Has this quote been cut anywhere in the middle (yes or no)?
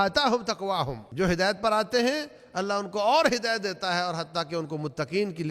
yes